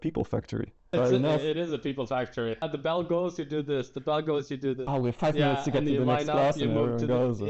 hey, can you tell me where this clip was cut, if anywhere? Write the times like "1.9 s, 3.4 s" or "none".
0.9 s, 2.7 s, 4.8 s